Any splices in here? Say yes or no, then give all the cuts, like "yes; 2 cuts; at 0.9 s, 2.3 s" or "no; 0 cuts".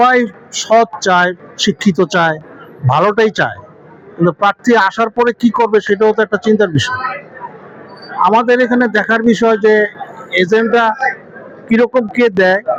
no; 0 cuts